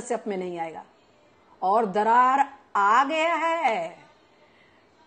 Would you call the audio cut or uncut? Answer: uncut